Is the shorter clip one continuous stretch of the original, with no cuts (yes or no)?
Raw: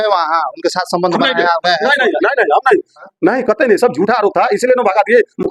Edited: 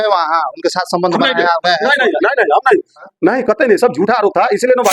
yes